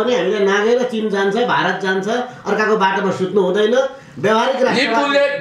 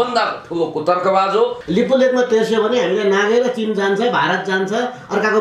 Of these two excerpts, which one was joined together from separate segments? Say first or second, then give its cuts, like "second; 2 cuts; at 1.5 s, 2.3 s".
second; 1 cut; at 1.6 s